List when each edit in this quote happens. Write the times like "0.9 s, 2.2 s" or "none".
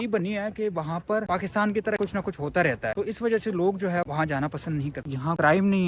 none